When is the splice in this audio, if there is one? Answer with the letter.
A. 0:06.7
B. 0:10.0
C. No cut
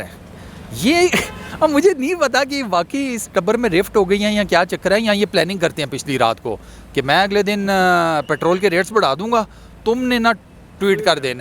C